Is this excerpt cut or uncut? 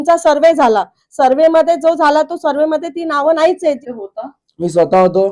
cut